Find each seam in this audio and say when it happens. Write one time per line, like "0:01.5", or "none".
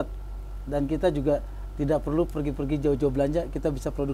none